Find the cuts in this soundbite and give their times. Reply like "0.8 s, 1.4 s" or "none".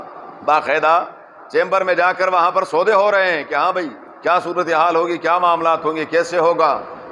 none